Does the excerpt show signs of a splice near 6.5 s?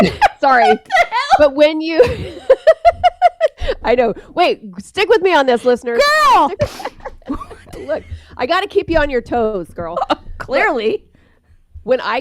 yes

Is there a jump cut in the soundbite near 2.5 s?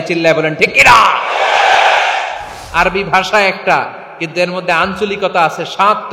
yes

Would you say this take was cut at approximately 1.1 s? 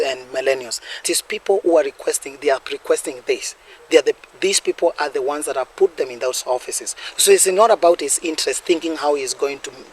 yes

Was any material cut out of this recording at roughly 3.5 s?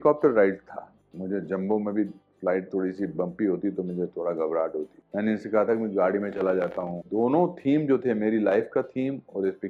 no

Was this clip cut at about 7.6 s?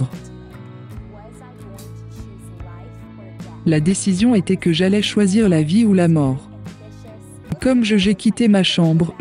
yes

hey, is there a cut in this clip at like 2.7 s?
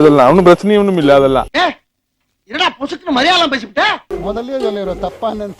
no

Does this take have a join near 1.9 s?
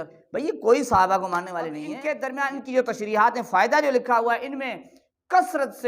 yes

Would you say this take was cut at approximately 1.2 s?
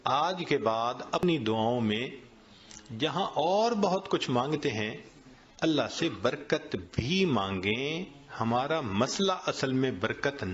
yes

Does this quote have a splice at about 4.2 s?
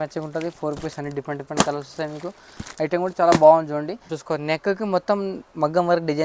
yes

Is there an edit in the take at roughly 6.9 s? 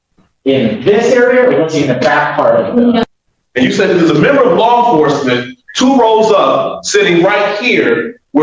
no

